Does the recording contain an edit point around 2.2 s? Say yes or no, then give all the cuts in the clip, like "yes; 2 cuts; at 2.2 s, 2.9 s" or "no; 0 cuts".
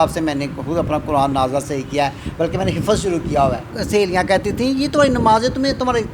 no; 1 cut; at 3.8 s